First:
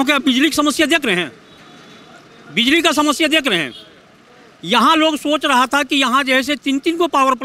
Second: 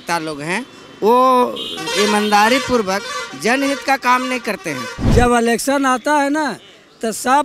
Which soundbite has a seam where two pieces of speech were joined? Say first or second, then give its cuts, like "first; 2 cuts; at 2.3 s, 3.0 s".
second; 1 cut; at 4.9 s